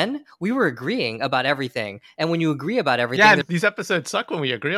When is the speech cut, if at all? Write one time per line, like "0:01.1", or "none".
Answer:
0:03.4